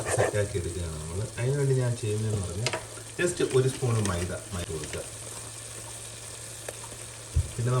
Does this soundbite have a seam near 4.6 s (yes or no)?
yes